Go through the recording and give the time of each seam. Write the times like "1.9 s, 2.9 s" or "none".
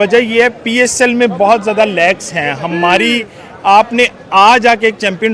none

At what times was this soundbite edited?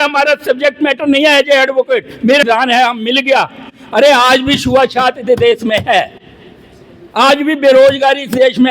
2.4 s

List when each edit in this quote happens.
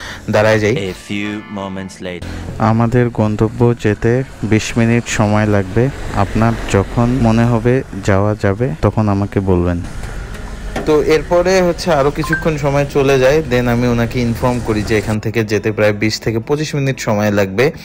2.2 s, 7.2 s, 8.7 s

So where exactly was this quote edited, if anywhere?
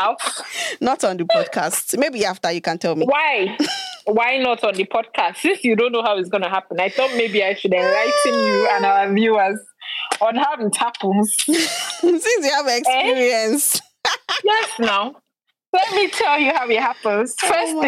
none

